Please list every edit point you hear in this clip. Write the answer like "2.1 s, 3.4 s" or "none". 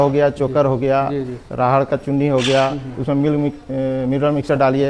none